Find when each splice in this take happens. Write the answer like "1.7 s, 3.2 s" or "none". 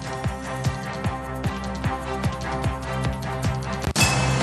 1.0 s